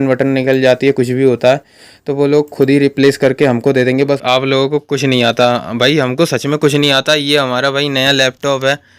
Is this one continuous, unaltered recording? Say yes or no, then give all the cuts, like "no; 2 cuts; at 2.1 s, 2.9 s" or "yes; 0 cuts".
no; 1 cut; at 4.0 s